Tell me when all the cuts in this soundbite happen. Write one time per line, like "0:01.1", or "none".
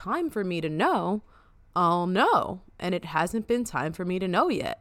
none